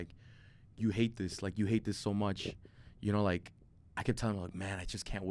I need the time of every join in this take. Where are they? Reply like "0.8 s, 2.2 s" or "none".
none